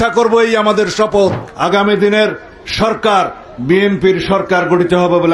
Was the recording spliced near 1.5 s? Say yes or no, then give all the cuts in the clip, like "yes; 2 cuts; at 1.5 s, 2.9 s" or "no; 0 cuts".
yes; 1 cut; at 1.5 s